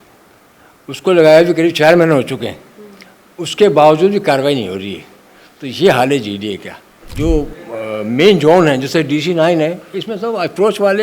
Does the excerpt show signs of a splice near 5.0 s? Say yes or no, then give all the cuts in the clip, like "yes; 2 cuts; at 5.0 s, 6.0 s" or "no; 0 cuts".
no; 1 cut; at 7.0 s